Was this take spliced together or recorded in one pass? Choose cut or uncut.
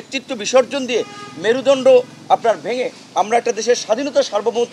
uncut